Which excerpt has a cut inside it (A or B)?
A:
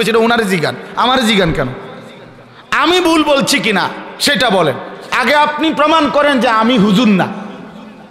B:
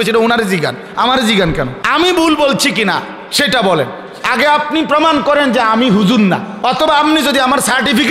B